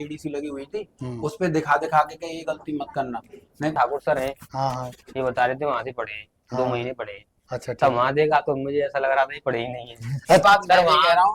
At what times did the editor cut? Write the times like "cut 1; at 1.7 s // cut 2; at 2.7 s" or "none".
cut 1; at 3.7 s // cut 2; at 10.4 s

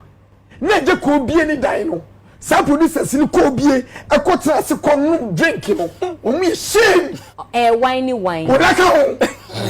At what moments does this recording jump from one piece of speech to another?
cut 1; at 7.2 s

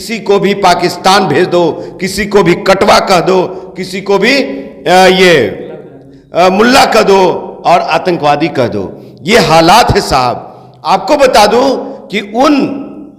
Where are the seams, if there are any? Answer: none

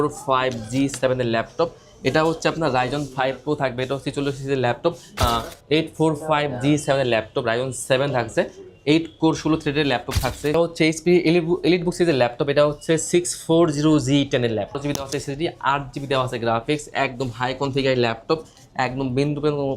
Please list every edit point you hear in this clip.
cut 1; at 5.2 s // cut 2; at 10.5 s // cut 3; at 14.8 s

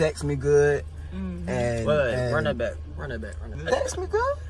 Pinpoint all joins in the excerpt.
cut 1; at 3.5 s

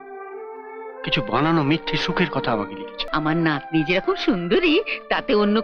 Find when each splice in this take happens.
cut 1; at 3.0 s

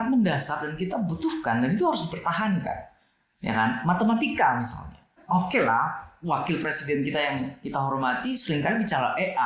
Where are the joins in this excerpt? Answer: cut 1; at 5.2 s

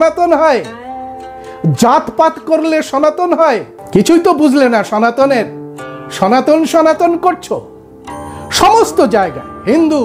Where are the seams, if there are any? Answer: cut 1; at 3.7 s

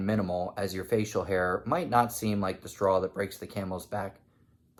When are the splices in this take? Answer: none

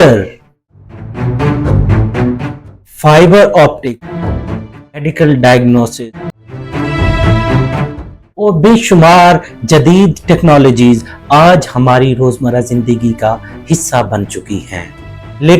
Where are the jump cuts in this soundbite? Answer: cut 1; at 4.1 s // cut 2; at 6.0 s

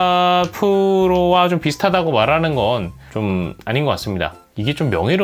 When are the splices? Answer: none

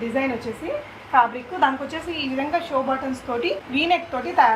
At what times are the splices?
cut 1; at 3.6 s

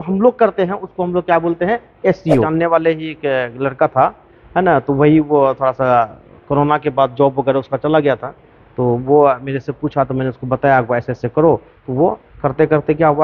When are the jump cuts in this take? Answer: cut 1; at 2.4 s

